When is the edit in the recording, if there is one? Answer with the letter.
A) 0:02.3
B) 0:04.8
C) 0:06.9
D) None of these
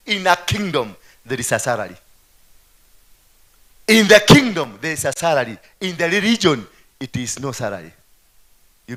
D